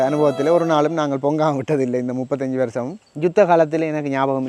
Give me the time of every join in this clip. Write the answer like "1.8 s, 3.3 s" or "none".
none